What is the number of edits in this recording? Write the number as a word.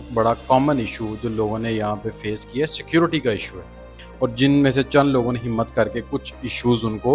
one